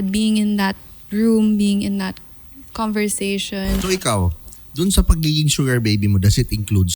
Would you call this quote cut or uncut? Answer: cut